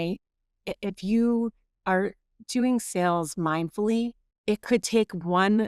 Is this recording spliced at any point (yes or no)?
yes